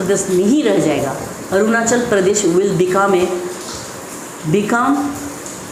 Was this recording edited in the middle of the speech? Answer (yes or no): no